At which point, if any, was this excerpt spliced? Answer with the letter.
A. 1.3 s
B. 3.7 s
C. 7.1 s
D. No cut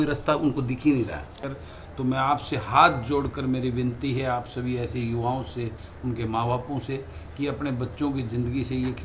A